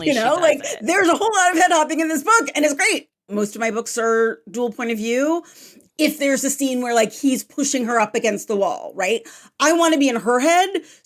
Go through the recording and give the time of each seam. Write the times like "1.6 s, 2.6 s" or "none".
3.3 s